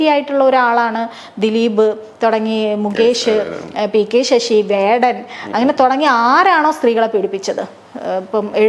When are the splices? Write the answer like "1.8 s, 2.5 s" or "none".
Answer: none